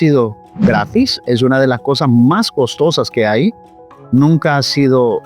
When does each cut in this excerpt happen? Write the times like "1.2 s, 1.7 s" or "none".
none